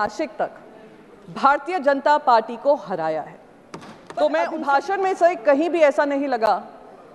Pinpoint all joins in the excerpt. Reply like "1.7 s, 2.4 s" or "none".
4.3 s